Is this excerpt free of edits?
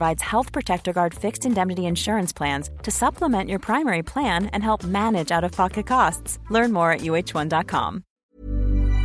no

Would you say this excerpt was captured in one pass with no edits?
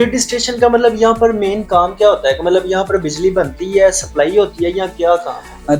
yes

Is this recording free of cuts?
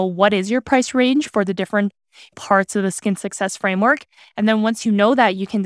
yes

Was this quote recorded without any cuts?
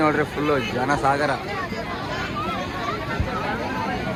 yes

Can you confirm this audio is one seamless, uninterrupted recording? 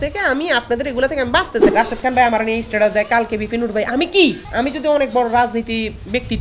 no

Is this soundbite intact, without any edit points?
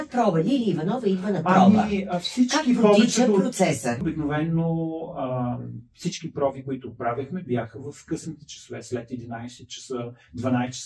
no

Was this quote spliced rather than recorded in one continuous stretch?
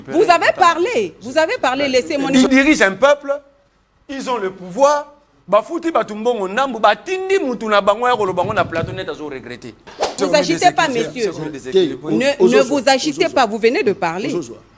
yes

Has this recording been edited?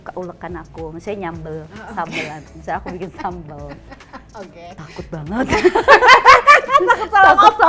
no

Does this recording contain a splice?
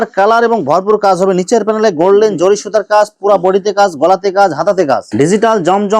yes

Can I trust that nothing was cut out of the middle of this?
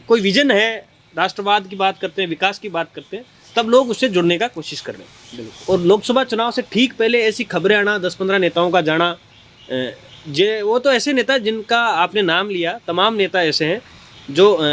yes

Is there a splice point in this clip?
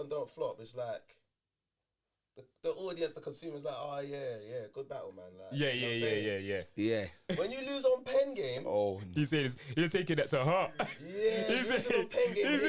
no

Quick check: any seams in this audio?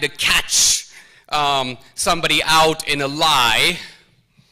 yes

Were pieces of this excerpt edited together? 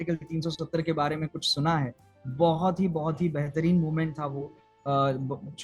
no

